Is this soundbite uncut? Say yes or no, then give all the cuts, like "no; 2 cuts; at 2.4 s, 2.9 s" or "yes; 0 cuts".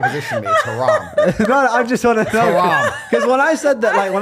yes; 0 cuts